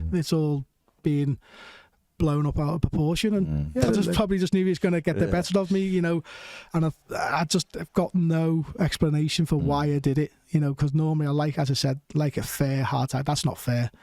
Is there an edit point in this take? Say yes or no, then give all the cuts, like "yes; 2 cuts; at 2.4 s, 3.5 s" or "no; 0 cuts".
yes; 1 cut; at 4.1 s